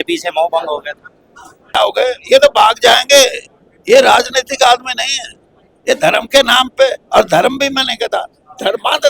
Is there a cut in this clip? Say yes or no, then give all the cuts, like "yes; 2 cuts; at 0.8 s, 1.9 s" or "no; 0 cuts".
yes; 1 cut; at 1.8 s